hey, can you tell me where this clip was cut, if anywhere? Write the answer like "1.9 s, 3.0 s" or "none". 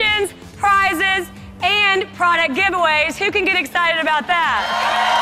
none